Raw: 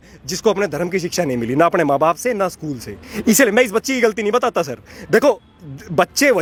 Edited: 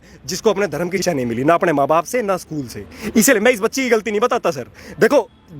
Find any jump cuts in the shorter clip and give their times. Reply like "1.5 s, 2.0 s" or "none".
1.0 s